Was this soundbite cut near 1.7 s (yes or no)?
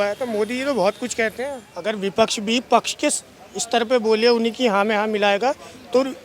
yes